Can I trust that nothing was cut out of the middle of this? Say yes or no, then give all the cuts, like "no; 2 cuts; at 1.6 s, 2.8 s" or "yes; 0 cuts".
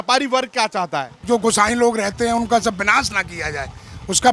no; 1 cut; at 1.1 s